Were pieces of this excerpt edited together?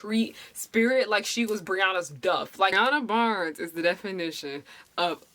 yes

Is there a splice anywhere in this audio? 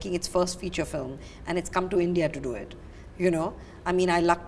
no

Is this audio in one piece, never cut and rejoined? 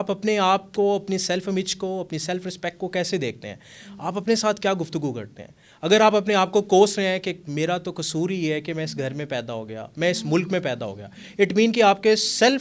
yes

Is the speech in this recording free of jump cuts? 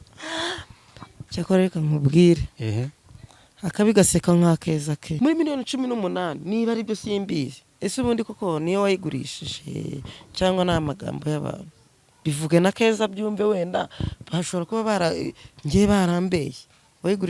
no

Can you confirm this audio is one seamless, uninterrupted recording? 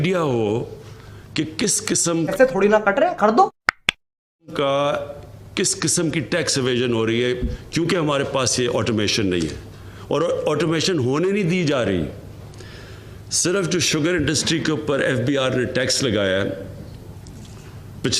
no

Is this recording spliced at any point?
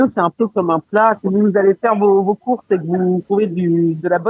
yes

